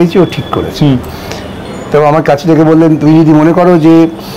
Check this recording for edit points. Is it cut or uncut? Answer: uncut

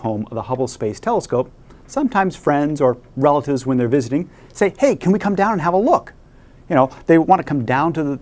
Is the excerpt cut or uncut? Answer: uncut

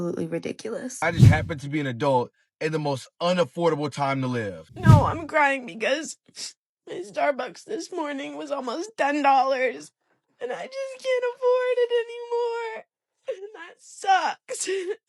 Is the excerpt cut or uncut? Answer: cut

